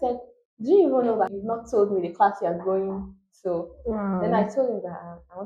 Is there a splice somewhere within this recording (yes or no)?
yes